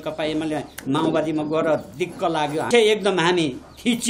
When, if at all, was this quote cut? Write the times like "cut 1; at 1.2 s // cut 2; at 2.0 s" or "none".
cut 1; at 2.7 s